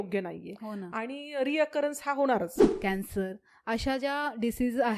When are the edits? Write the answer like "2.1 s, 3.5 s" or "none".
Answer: 2.6 s

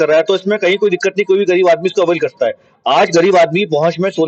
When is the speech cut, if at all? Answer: none

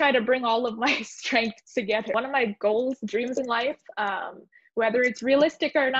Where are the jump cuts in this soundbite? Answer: 2.1 s

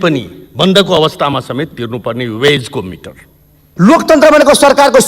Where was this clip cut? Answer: 3.7 s

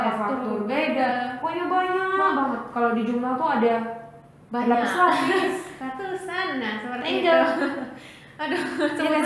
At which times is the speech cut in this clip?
none

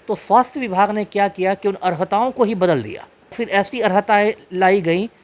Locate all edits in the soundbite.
3.4 s

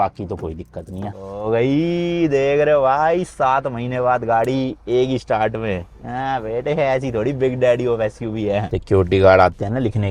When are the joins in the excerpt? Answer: 1.1 s, 8.7 s

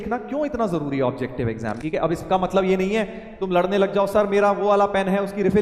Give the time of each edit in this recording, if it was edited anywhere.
1.8 s

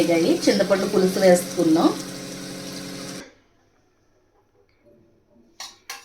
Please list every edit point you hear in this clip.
3.2 s

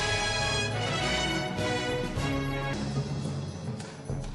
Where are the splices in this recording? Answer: 1.4 s, 2.4 s

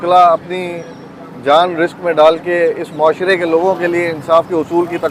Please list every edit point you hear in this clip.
none

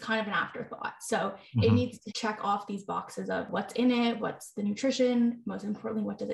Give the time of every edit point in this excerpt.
2.0 s, 3.5 s, 4.2 s

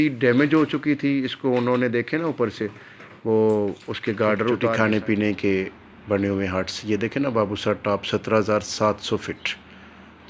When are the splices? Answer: 4.7 s

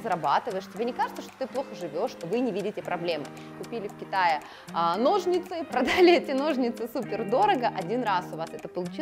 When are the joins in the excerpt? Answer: 2.1 s, 3.5 s, 5.7 s

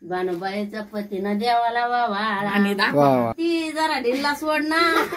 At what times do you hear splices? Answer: 3.3 s

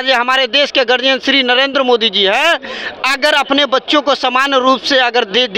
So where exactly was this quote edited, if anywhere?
none

